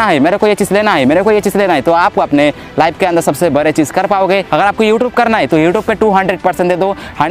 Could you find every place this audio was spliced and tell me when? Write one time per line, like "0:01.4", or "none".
0:04.5